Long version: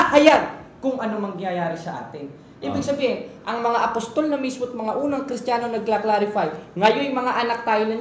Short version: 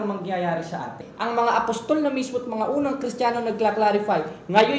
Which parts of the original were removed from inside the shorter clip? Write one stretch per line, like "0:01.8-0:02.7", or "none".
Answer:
0:02.2-0:03.3